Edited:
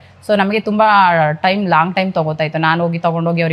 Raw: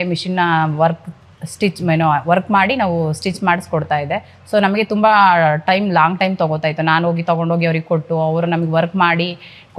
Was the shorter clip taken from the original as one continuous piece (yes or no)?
yes